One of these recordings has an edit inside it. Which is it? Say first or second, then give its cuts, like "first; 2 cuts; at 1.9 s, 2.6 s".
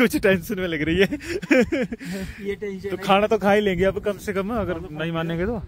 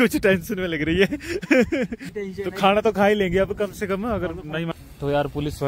second; 2 cuts; at 2.1 s, 4.7 s